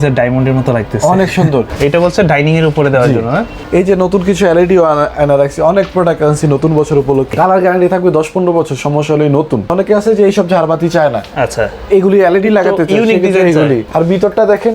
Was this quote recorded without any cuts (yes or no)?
no